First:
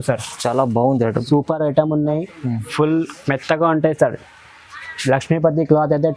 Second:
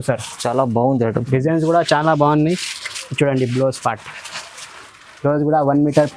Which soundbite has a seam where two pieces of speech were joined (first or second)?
first